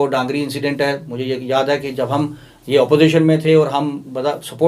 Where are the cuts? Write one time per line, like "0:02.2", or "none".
none